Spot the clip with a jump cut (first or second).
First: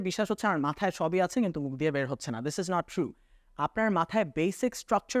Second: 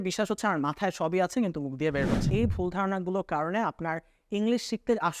second